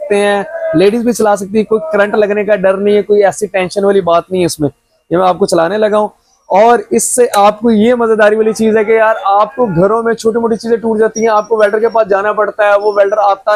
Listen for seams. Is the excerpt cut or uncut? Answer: uncut